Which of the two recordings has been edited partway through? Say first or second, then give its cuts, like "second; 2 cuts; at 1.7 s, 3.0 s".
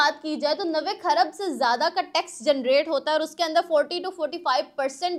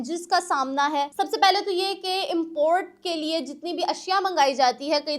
second; 1 cut; at 1.1 s